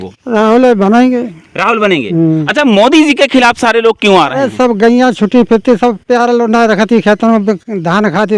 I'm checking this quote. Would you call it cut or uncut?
uncut